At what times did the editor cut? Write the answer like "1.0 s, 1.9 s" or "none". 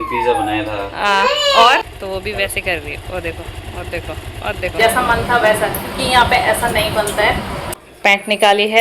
1.9 s, 4.8 s, 7.7 s